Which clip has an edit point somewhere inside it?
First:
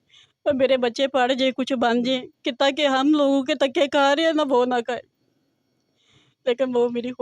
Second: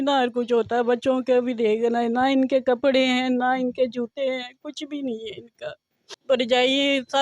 second; 1 cut; at 6.1 s

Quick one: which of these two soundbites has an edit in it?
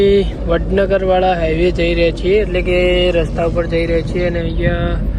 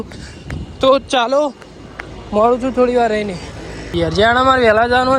second; 1 cut; at 3.9 s

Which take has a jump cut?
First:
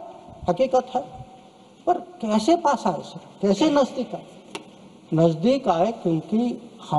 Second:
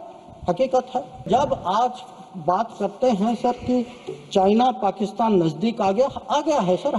second; 1 cut; at 1.3 s

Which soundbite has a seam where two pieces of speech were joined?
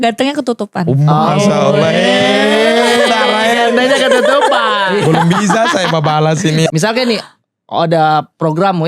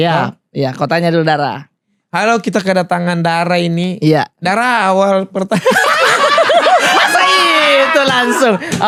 first; 2 cuts; at 4.9 s, 6.7 s

